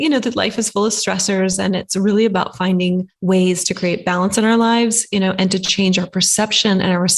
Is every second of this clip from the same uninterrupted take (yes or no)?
no